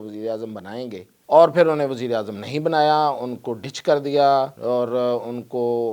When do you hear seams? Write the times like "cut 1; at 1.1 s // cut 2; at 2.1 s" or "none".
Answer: cut 1; at 1.1 s // cut 2; at 4.6 s